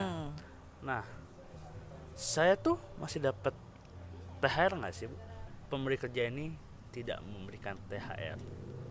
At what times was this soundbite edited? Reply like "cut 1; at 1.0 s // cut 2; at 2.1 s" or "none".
cut 1; at 5.6 s